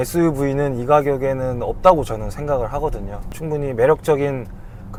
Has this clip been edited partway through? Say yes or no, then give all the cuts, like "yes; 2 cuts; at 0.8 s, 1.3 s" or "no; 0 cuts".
no; 0 cuts